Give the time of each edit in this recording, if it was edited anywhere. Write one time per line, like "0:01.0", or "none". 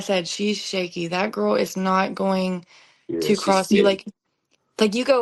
none